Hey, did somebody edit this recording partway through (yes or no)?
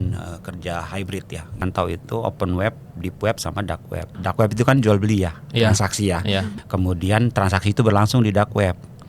yes